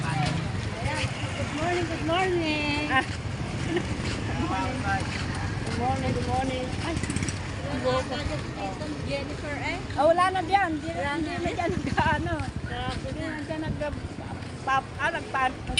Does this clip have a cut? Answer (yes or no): no